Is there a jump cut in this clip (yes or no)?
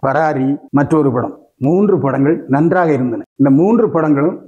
no